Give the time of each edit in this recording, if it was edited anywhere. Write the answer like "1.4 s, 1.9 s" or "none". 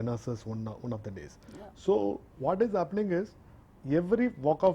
none